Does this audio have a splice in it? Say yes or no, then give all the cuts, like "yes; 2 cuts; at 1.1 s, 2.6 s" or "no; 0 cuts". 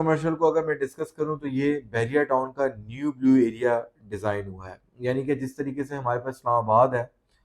no; 0 cuts